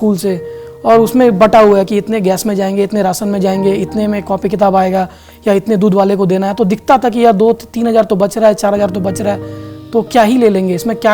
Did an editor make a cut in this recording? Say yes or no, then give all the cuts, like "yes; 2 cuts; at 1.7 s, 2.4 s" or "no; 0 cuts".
no; 0 cuts